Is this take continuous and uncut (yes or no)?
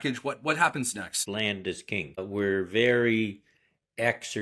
no